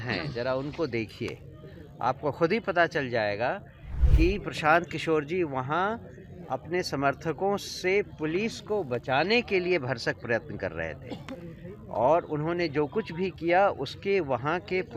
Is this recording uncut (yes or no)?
yes